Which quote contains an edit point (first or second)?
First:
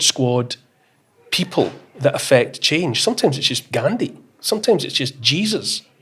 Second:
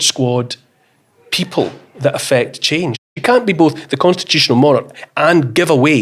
second